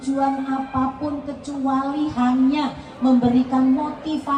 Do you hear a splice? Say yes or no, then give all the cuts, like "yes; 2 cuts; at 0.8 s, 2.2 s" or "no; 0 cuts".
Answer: no; 0 cuts